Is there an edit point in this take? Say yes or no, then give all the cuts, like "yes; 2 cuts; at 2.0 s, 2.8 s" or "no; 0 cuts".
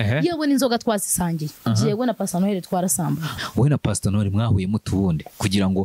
yes; 2 cuts; at 1.5 s, 3.3 s